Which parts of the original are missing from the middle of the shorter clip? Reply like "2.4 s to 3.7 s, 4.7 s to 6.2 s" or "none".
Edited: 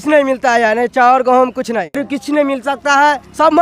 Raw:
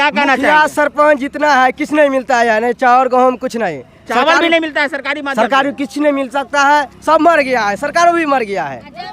3.9 s to 5.7 s